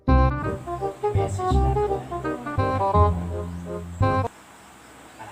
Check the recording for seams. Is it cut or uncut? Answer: cut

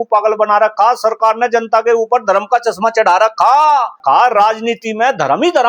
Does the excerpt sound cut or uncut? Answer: cut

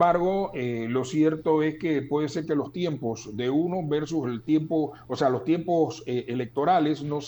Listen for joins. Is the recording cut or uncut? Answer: uncut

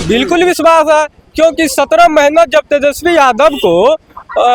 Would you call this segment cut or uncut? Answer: uncut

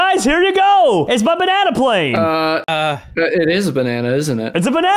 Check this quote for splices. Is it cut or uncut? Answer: cut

